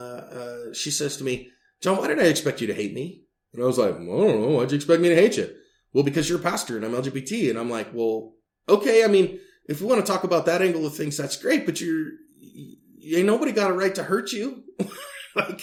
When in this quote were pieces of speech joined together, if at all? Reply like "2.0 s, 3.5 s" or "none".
none